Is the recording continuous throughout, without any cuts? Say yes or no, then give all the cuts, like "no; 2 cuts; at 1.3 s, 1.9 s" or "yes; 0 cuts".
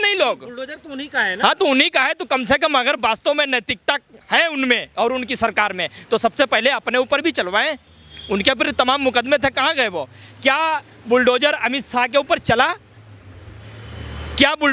yes; 0 cuts